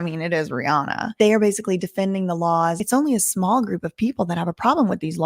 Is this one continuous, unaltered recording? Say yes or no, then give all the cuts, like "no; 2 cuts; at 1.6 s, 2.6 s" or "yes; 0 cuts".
no; 2 cuts; at 1.1 s, 2.8 s